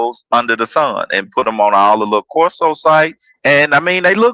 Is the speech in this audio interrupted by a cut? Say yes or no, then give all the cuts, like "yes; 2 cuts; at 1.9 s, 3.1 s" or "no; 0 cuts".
yes; 1 cut; at 3.3 s